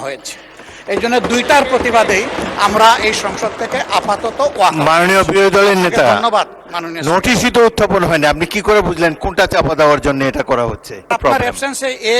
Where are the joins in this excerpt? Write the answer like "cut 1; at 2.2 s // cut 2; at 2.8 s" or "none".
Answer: cut 1; at 11.1 s